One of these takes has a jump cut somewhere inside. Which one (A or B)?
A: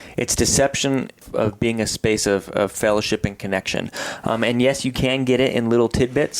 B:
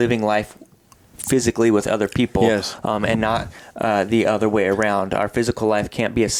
A